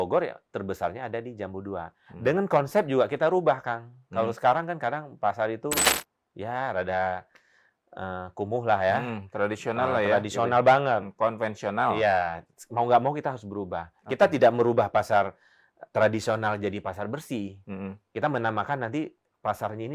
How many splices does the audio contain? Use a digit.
0